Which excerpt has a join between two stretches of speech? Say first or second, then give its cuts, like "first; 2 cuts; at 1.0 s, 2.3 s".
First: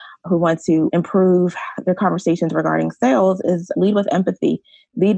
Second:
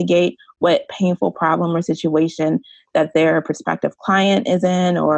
first; 1 cut; at 0.9 s